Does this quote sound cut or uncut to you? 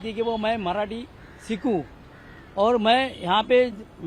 uncut